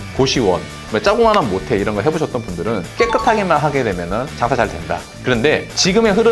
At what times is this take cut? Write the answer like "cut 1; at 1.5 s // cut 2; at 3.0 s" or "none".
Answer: cut 1; at 5.1 s